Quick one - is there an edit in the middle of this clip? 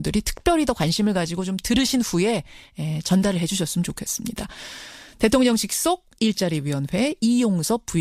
yes; 1 cut; at 4.0 s

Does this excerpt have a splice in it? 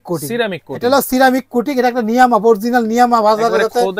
no; 0 cuts

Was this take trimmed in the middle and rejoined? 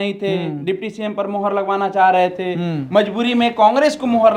no; 0 cuts

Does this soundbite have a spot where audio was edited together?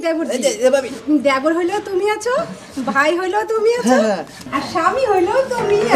no; 0 cuts

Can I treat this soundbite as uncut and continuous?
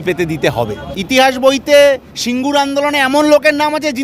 no; 1 cut; at 0.9 s

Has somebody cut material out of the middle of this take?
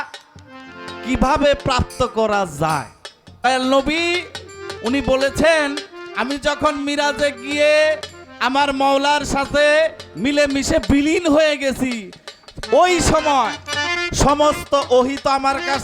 yes; 1 cut; at 3.5 s

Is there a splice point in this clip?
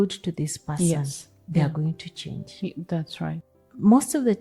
yes; 1 cut; at 3.4 s

